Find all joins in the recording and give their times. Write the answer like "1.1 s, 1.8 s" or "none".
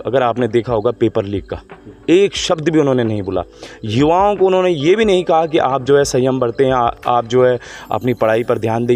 none

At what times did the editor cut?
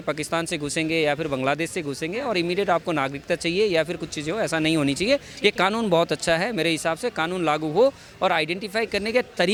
none

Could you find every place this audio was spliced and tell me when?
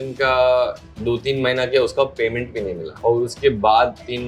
3.0 s

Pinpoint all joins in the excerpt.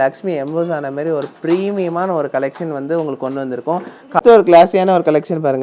none

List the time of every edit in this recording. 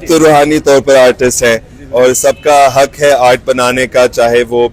none

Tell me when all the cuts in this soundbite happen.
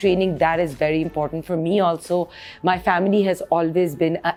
none

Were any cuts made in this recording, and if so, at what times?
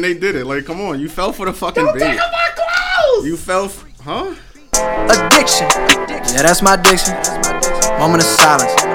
4.7 s

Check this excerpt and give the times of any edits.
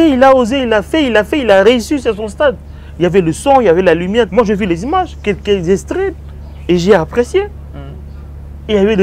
4.3 s

